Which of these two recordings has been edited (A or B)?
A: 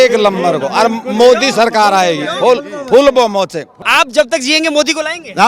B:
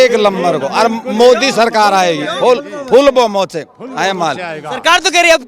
A